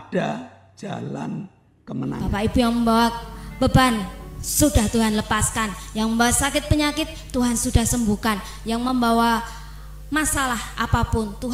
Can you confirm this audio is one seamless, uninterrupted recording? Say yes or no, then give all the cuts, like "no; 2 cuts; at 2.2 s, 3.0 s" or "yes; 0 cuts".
no; 1 cut; at 2.2 s